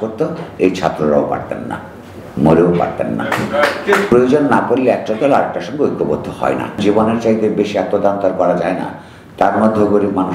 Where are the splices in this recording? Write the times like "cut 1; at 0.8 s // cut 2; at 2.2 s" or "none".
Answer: cut 1; at 4.1 s // cut 2; at 6.8 s